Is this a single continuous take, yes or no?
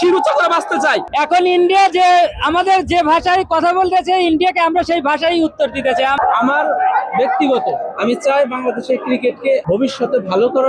no